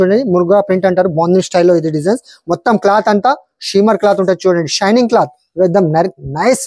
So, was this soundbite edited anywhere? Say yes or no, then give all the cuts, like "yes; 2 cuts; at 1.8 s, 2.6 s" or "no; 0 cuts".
no; 0 cuts